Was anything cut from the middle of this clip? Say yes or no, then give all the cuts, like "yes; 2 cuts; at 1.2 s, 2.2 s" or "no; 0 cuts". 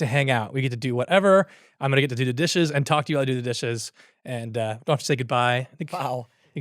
no; 0 cuts